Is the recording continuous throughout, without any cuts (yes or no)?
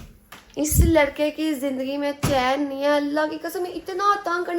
yes